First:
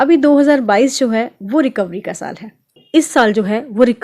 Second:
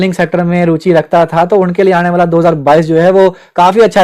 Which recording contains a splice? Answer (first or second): first